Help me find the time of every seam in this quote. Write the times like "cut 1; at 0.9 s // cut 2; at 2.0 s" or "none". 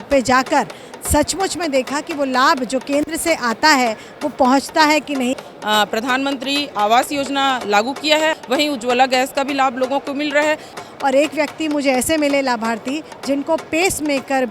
cut 1; at 5.3 s // cut 2; at 8.3 s // cut 3; at 10.8 s